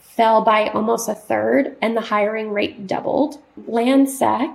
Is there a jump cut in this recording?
yes; 1 cut; at 3.6 s

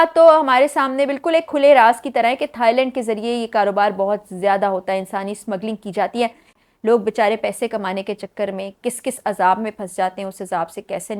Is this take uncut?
no; 1 cut; at 6.6 s

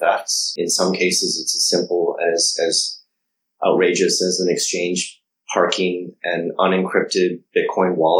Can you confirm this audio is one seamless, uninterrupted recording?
yes; 0 cuts

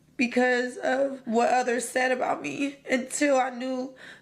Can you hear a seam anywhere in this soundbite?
yes; 1 cut; at 1.2 s

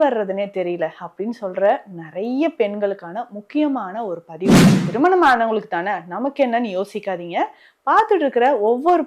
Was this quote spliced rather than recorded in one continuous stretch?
yes; 1 cut; at 4.7 s

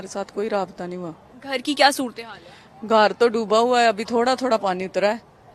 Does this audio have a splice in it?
no; 0 cuts

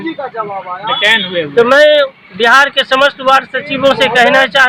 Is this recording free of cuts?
yes; 0 cuts

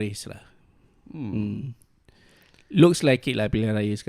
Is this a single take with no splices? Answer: yes; 0 cuts

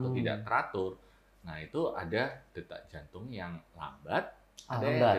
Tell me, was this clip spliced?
no; 0 cuts

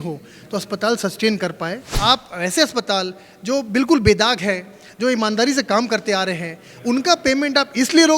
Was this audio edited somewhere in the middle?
yes; 1 cut; at 1.9 s

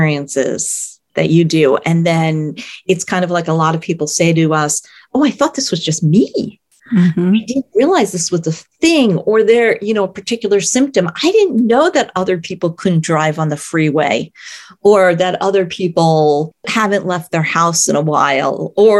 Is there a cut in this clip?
no; 0 cuts

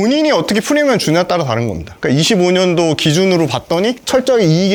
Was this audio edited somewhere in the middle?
no; 0 cuts

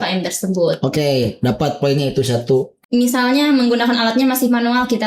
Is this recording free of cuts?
no; 1 cut; at 2.7 s

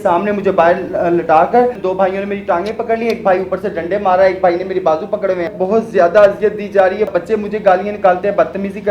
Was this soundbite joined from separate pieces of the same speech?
yes; 3 cuts; at 1.8 s, 5.6 s, 7.1 s

